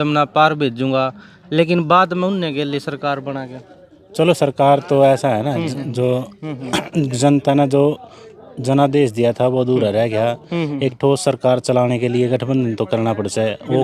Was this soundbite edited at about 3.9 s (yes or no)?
no